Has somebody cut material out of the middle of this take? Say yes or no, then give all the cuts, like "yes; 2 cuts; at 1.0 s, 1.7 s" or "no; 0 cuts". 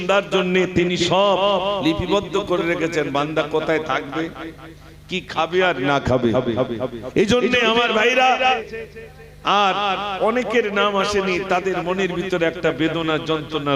yes; 1 cut; at 8.6 s